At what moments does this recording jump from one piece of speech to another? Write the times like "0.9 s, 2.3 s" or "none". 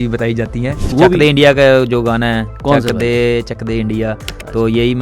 0.9 s